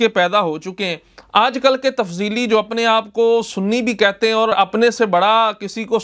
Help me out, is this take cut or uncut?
uncut